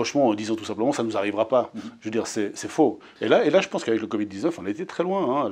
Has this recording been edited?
yes; 1 cut; at 3.1 s

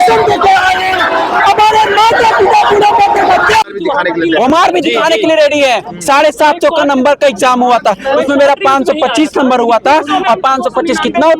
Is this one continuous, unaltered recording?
no; 1 cut; at 3.6 s

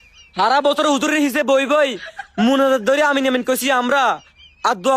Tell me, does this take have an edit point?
no; 0 cuts

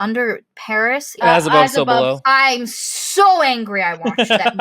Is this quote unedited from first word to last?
no; 1 cut; at 1.2 s

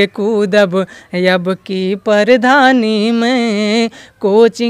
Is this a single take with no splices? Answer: yes; 0 cuts

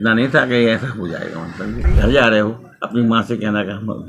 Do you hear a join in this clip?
yes; 1 cut; at 1.9 s

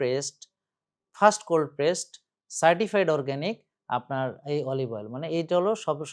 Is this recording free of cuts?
yes; 0 cuts

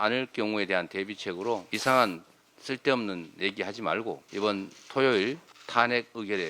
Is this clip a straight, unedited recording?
no; 3 cuts; at 1.7 s, 4.2 s, 5.5 s

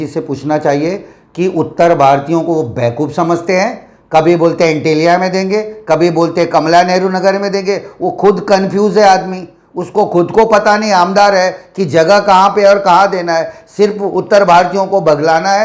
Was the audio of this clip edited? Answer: no; 0 cuts

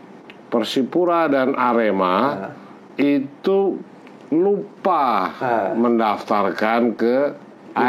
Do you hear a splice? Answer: no; 0 cuts

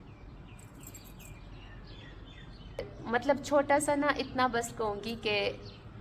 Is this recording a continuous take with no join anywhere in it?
no; 1 cut; at 2.9 s

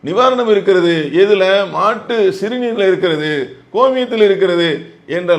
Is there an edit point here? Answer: no; 0 cuts

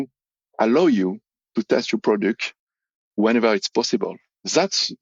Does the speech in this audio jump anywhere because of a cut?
yes; 1 cut; at 3.2 s

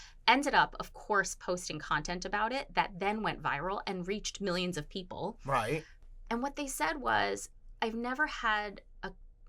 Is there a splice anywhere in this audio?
no; 0 cuts

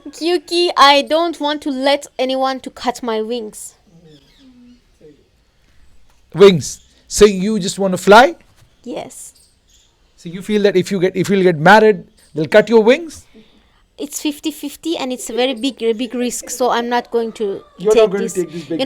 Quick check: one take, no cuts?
yes; 0 cuts

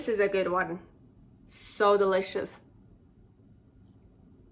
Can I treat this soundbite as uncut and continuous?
yes; 0 cuts

